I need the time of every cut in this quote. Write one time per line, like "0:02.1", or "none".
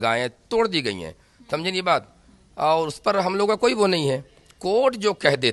none

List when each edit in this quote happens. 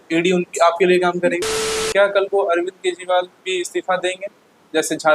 0:01.5

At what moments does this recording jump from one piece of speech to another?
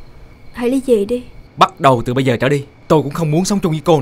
0:01.4
0:02.7

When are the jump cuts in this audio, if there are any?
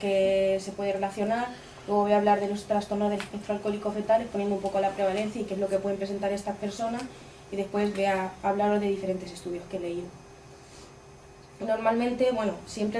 0:09.3

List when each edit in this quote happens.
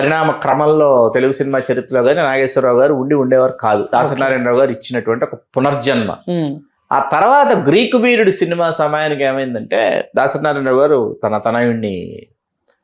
none

